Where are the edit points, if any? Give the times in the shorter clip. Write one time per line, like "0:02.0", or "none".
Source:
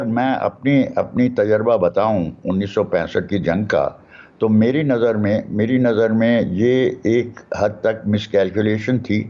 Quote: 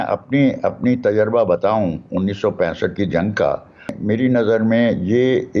0:04.0